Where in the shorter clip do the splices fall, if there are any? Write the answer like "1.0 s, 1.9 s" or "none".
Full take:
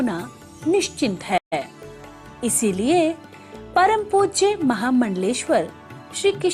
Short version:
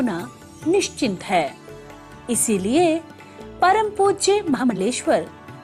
1.4 s, 4.7 s

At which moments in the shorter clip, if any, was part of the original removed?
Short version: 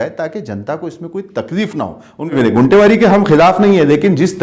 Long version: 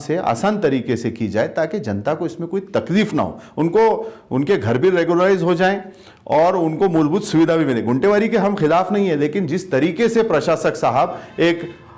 2.3 s

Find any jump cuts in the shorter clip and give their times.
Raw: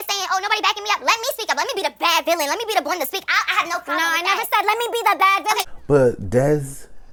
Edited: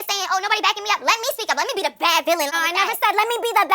2.5 s

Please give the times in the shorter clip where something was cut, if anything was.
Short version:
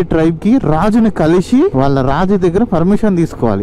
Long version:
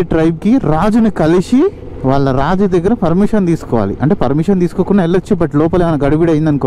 1.7 s

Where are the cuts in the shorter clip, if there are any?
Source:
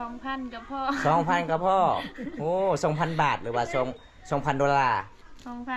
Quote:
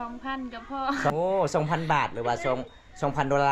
1.1 s

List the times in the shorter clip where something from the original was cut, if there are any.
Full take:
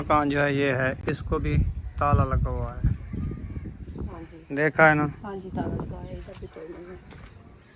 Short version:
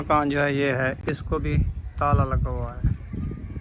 none

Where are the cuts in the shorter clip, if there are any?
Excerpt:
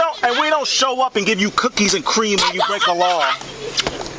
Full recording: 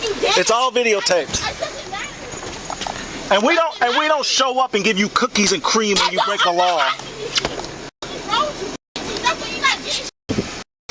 none

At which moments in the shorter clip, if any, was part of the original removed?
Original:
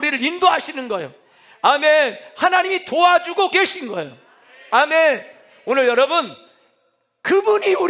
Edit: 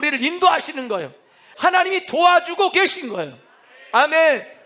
1.4 s

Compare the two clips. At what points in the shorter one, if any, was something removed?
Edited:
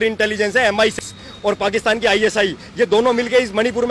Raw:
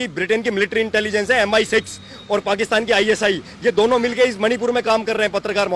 1.0 s

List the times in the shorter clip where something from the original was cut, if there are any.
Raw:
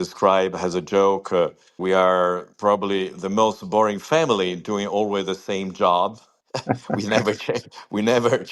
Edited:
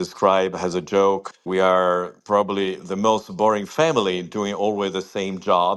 1.2 s

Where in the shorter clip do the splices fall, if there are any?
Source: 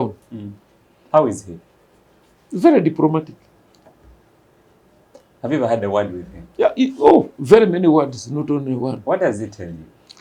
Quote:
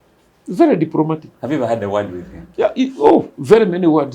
1.3 s

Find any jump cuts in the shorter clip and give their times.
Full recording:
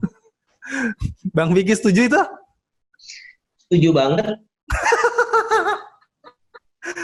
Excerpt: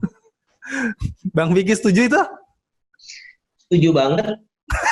none

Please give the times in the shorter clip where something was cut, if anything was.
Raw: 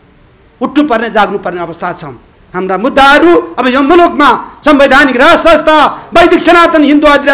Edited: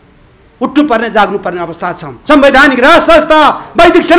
2.1 s

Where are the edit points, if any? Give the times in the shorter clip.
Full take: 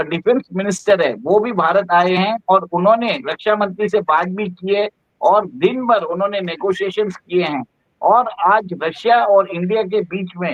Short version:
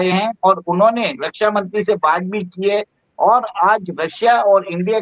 3.0 s

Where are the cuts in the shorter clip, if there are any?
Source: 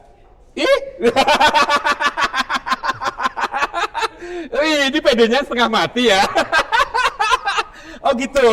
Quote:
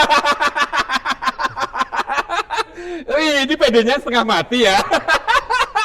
none

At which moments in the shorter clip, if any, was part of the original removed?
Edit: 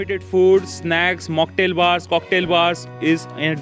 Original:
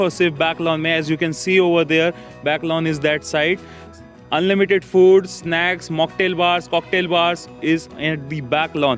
none

